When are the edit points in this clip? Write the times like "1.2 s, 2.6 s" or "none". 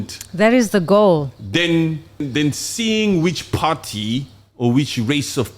2.3 s